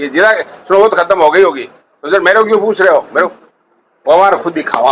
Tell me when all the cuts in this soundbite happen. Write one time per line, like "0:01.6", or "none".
0:03.3